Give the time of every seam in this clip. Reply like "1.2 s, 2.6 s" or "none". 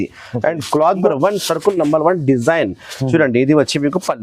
1.0 s